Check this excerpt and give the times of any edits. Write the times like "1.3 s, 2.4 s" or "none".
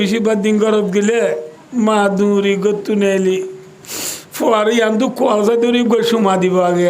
1.5 s